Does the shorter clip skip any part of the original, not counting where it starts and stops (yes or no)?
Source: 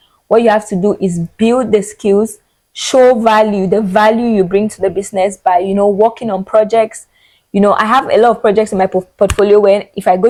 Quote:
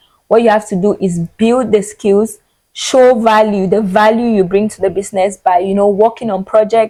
no